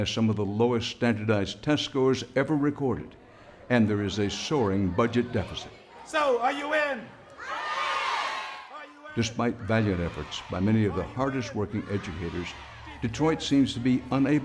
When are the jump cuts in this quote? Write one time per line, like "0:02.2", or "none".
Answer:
0:02.4